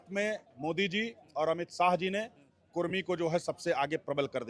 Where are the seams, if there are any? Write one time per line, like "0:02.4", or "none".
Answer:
none